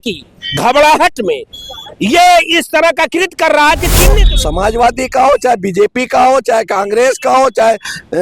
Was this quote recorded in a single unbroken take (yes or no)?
no